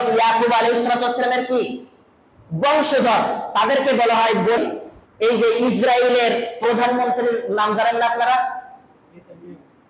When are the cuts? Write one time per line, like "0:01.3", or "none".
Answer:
0:04.6